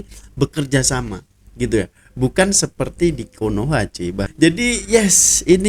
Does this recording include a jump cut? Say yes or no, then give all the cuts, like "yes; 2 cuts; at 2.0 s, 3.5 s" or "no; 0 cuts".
no; 0 cuts